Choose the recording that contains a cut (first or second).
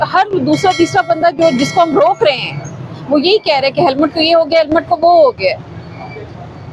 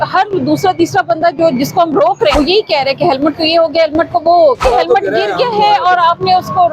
second